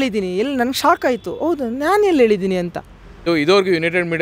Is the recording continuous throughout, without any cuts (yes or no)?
no